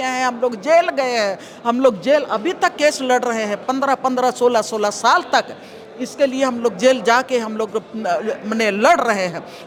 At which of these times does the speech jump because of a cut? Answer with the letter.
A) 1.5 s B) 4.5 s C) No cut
C